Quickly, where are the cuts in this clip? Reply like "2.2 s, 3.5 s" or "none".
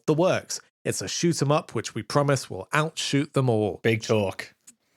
3.8 s